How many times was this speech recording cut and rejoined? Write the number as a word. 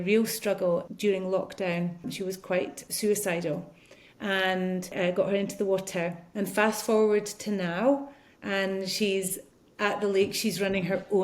four